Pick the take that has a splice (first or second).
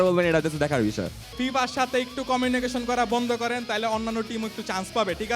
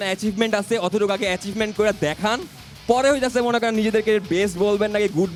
first